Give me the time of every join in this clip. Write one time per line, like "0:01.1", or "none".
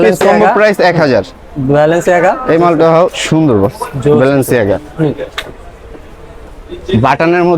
none